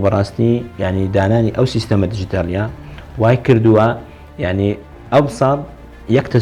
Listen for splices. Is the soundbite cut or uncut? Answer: uncut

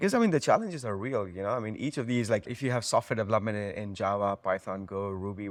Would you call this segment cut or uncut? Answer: uncut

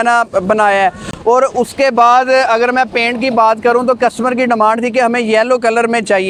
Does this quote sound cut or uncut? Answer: uncut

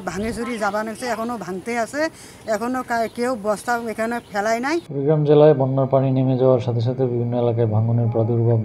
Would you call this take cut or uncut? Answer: cut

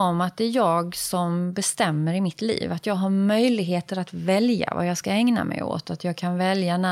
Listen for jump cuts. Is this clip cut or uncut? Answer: uncut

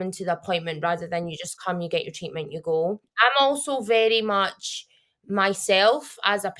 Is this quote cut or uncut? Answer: cut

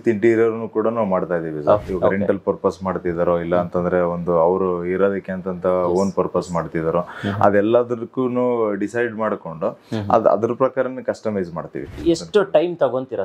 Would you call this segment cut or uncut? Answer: cut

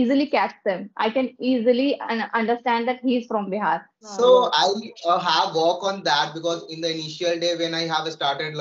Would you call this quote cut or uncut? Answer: cut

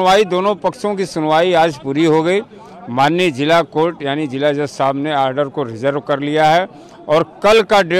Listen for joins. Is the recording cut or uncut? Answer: uncut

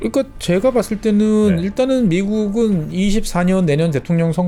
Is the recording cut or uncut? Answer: uncut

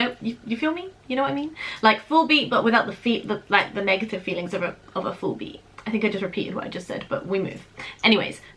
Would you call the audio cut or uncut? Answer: uncut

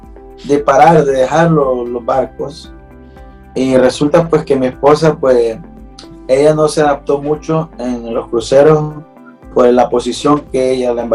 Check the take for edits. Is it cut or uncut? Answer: uncut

